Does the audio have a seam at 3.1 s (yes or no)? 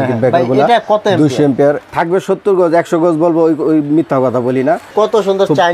no